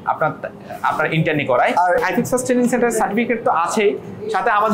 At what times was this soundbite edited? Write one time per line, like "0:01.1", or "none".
0:02.0